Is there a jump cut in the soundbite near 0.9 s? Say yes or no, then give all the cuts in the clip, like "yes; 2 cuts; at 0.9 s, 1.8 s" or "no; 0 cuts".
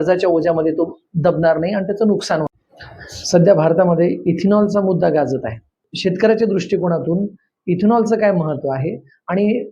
no; 1 cut; at 2.5 s